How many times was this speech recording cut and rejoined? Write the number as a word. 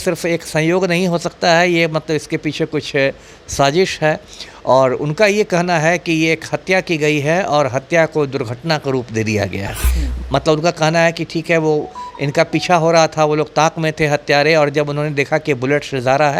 zero